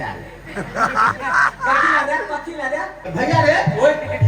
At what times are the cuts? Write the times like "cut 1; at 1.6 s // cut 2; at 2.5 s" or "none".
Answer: cut 1; at 3.1 s